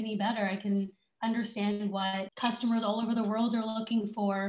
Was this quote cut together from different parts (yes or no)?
yes